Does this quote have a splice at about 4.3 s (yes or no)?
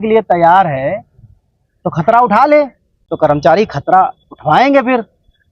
no